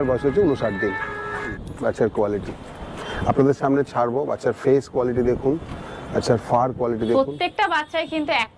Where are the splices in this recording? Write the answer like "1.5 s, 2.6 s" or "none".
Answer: none